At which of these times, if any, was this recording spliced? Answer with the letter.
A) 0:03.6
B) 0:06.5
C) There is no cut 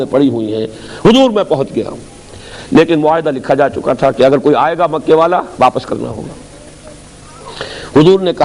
C